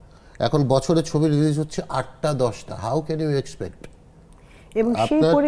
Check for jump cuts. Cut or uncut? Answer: uncut